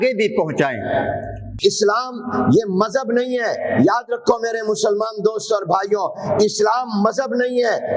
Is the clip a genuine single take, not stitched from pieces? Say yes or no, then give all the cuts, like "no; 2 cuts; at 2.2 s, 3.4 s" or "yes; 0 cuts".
no; 1 cut; at 1.4 s